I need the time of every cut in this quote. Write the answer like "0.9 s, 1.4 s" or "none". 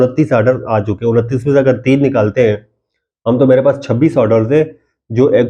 none